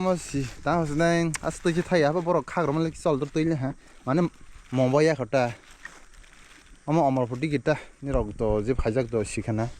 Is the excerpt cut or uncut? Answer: uncut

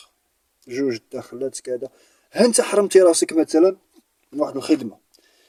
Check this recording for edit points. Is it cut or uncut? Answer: uncut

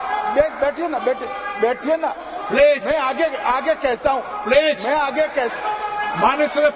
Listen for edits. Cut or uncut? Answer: uncut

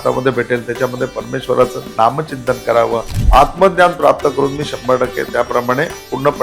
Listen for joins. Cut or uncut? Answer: cut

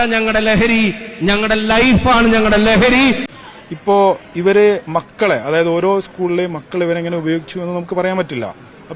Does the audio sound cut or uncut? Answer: cut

